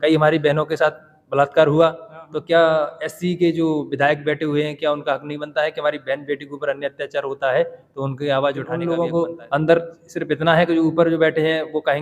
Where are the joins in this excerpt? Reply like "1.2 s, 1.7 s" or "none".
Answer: 8.7 s